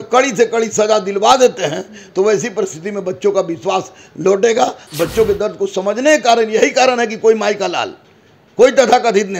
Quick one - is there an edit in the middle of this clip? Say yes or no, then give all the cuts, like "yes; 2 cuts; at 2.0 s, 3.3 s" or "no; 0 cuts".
yes; 1 cut; at 4.9 s